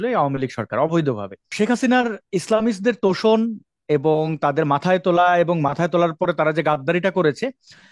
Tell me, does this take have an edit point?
yes; 1 cut; at 1.5 s

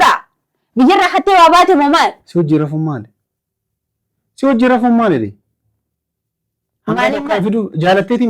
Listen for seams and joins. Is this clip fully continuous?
yes; 0 cuts

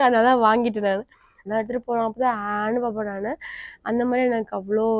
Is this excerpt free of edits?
no; 1 cut; at 1.3 s

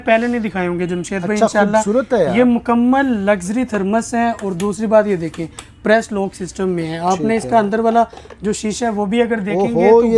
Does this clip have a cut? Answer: no; 0 cuts

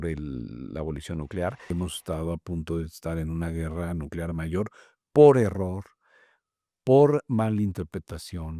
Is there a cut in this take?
yes; 1 cut; at 1.7 s

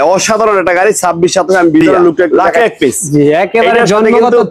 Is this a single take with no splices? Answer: no; 1 cut; at 2.3 s

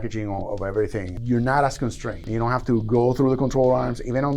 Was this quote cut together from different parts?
yes; 2 cuts; at 1.1 s, 2.2 s

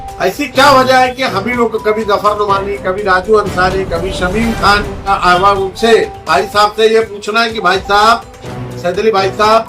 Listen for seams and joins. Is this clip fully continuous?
no; 1 cut; at 5.0 s

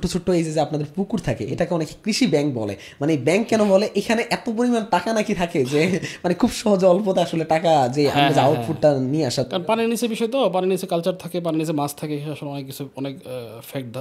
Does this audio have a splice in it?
no; 0 cuts

